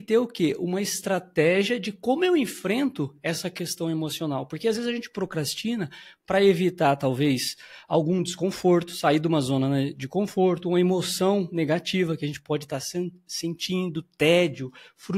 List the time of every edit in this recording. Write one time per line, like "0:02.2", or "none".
none